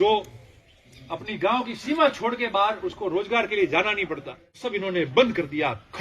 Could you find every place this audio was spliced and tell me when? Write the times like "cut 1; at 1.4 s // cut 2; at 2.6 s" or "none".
cut 1; at 4.5 s